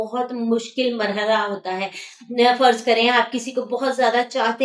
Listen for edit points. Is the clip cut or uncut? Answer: uncut